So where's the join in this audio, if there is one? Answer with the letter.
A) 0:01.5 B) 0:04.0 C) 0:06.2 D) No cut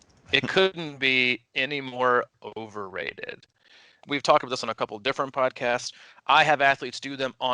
B